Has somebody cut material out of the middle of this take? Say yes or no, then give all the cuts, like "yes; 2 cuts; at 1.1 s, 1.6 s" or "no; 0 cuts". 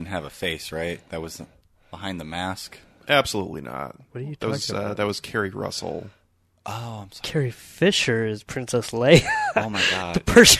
yes; 1 cut; at 3.0 s